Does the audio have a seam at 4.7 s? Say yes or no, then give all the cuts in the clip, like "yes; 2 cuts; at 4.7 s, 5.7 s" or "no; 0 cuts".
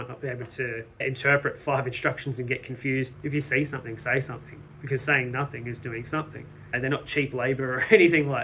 no; 2 cuts; at 3.1 s, 6.8 s